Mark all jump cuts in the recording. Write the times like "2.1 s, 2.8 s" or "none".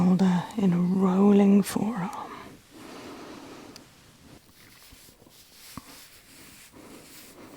4.4 s

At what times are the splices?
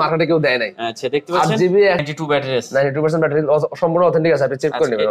2.0 s

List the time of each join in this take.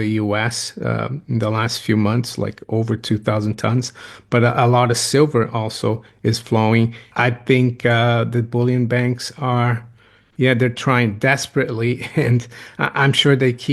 7.0 s

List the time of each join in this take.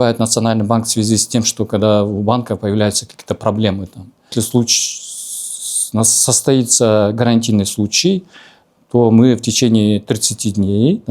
4.3 s

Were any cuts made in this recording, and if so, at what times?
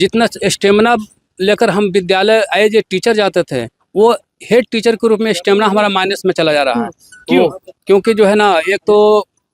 none

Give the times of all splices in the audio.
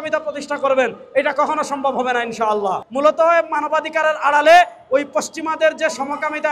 2.8 s

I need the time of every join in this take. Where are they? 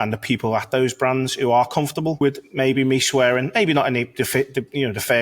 2.2 s

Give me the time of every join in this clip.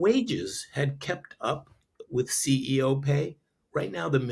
none

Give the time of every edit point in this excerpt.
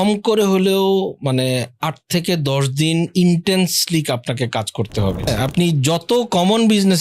5.3 s

